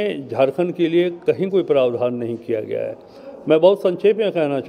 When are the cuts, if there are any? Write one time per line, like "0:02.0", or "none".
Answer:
none